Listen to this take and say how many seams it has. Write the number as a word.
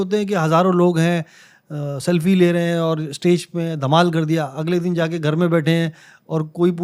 zero